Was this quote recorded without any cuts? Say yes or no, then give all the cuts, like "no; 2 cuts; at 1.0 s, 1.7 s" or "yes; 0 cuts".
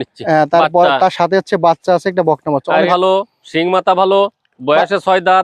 no; 1 cut; at 2.9 s